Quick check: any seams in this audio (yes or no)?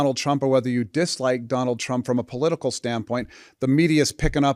no